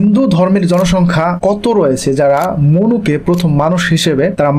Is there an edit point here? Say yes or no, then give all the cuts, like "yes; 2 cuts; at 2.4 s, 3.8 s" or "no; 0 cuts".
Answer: no; 0 cuts